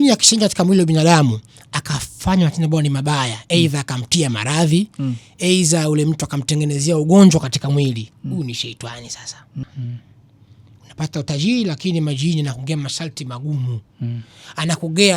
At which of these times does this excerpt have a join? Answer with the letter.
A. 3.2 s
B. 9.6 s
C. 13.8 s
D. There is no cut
B